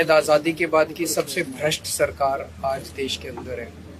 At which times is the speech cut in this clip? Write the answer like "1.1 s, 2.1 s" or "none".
none